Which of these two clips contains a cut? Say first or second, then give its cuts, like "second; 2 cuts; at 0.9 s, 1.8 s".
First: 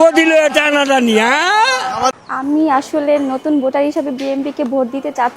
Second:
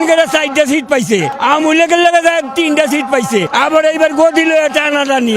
first; 1 cut; at 2.1 s